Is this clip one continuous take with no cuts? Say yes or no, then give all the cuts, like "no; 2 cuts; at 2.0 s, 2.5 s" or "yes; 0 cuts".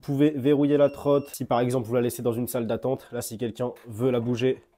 no; 1 cut; at 1.4 s